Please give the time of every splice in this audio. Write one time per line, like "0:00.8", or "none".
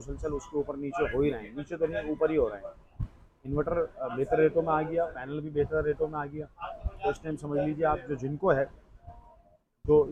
none